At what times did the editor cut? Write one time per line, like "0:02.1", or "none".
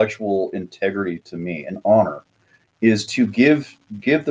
none

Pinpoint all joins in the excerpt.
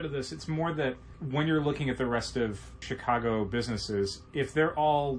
0:01.2
0:02.9

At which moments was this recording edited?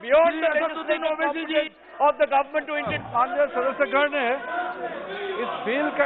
0:03.1

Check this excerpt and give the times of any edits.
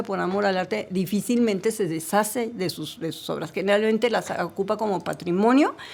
none

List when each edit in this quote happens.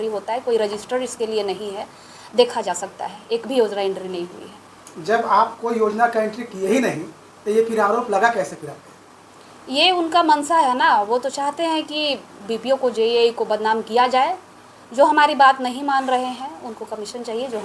none

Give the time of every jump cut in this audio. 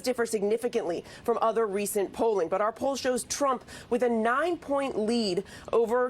0:01.5

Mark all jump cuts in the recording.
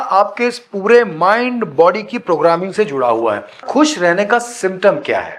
0:03.6

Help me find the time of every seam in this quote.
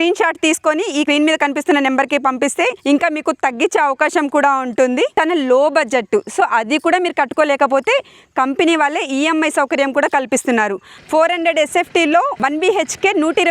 0:01.1
0:02.8
0:05.1
0:10.9
0:12.3

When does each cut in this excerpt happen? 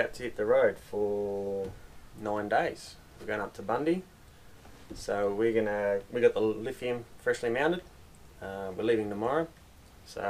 none

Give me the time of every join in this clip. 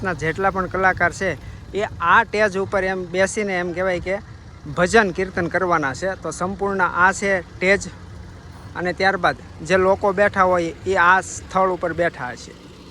none

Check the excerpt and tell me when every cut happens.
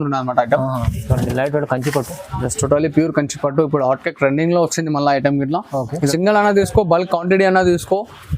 0:06.1

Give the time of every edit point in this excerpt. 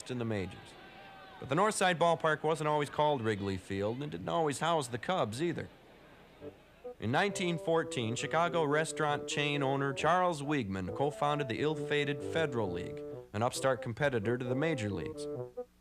0:11.5

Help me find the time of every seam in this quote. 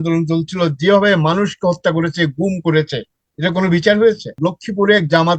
0:04.4

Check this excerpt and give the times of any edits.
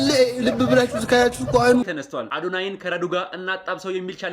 0:01.9

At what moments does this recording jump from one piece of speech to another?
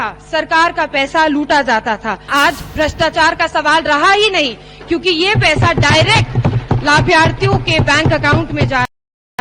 0:02.3

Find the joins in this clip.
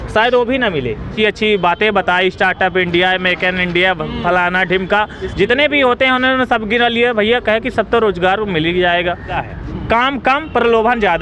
0:01.1
0:09.4

